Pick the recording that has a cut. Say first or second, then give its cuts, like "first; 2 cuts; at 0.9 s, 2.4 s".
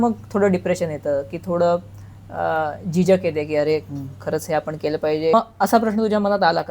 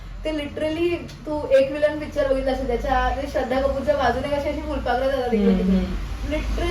first; 1 cut; at 5.3 s